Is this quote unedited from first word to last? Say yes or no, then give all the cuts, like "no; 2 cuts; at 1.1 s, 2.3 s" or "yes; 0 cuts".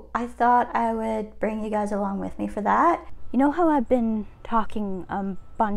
no; 1 cut; at 3.1 s